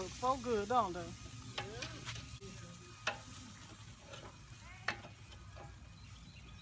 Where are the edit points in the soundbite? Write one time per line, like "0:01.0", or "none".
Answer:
0:02.4